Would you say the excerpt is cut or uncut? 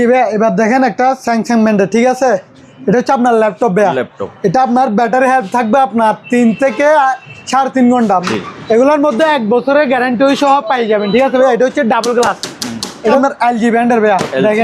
cut